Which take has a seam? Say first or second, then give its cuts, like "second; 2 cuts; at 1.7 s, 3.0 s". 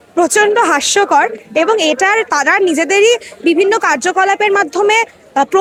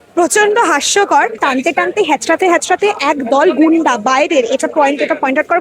second; 1 cut; at 1.4 s